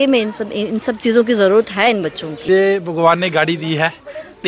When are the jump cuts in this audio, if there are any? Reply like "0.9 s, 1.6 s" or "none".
2.3 s